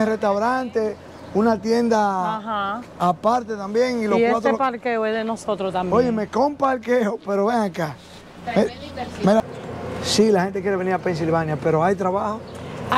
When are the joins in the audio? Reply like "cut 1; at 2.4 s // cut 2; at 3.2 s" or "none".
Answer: cut 1; at 9.4 s